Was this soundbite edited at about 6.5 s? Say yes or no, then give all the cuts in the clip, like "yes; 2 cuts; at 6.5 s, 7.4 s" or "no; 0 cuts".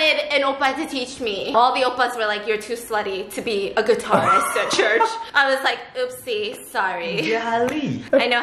no; 2 cuts; at 1.5 s, 5.2 s